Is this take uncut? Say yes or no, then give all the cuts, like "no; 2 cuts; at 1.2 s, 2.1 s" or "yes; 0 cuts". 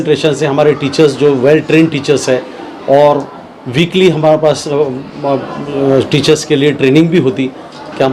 yes; 0 cuts